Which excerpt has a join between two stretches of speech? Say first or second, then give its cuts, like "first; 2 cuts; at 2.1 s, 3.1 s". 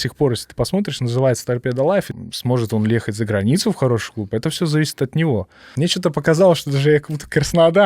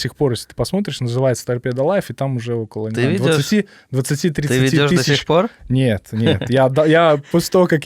first; 2 cuts; at 2.1 s, 5.6 s